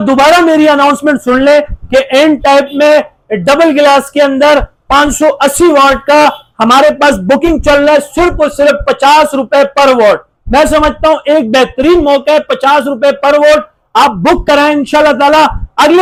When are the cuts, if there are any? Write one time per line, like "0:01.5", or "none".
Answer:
none